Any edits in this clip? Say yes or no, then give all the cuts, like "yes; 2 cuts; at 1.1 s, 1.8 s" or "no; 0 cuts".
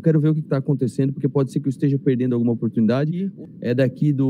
yes; 1 cut; at 3.3 s